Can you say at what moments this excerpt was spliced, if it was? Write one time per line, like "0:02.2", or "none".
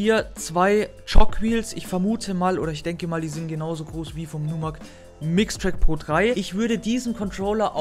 0:06.4